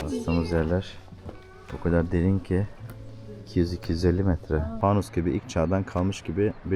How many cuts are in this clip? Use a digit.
1